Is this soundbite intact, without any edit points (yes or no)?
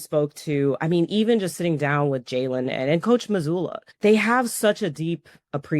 no